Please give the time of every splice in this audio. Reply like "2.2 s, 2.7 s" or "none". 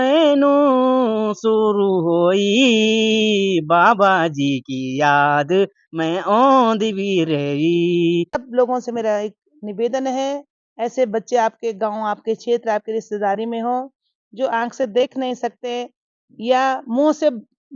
8.4 s